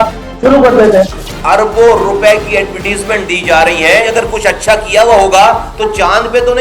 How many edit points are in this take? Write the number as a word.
two